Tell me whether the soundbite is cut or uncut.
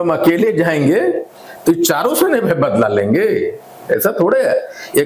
uncut